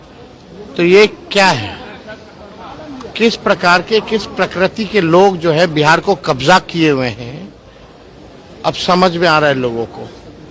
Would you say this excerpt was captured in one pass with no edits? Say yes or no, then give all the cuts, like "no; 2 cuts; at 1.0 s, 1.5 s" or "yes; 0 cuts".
yes; 0 cuts